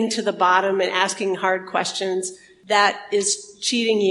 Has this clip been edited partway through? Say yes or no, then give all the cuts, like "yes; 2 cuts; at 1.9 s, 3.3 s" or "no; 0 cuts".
no; 0 cuts